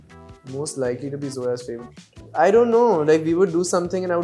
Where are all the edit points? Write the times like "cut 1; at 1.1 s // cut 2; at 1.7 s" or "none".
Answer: cut 1; at 1.7 s